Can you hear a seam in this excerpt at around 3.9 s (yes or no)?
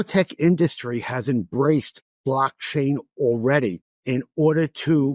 yes